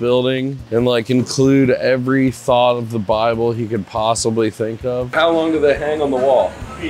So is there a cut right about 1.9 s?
no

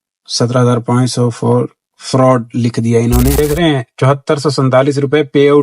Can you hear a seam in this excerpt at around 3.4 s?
yes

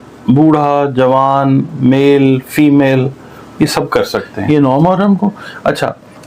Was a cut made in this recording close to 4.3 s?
yes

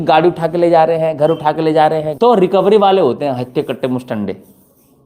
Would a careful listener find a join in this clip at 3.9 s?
no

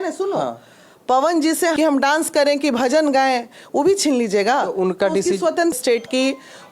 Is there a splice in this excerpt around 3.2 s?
no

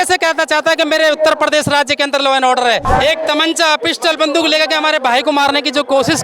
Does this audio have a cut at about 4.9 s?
no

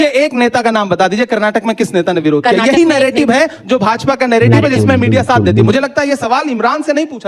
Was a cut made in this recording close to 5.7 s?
yes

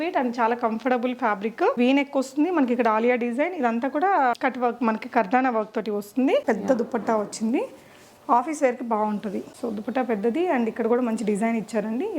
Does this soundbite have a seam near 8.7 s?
no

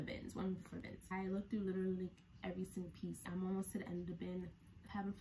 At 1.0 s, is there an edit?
yes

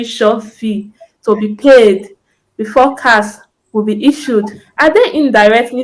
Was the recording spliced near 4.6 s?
yes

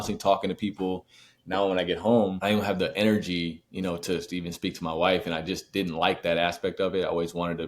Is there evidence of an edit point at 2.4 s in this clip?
yes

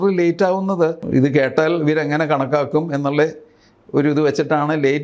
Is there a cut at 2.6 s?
no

